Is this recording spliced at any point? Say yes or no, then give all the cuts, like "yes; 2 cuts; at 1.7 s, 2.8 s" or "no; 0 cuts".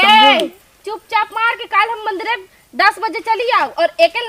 no; 0 cuts